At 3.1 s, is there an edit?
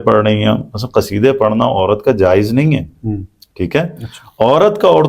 no; 0 cuts

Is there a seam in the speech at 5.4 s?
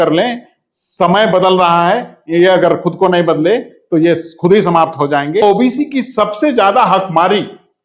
yes; 1 cut; at 5.4 s

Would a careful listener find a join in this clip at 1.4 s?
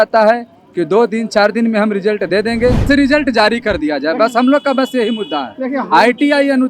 no; 1 cut; at 2.9 s

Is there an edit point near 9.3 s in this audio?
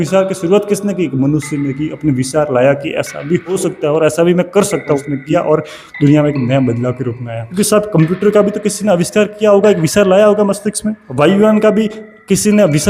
no; 4 cuts; at 3.6 s, 5.1 s, 7.5 s, 11.0 s

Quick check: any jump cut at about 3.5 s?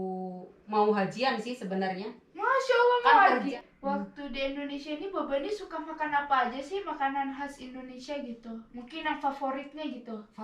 yes; 1 cut; at 3.5 s

